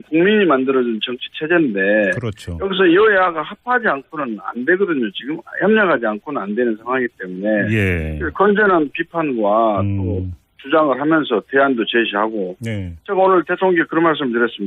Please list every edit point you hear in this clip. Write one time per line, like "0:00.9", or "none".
0:01.2